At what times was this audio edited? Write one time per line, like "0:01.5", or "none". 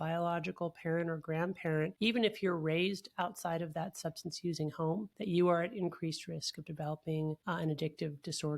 0:01.9
0:05.1
0:07.4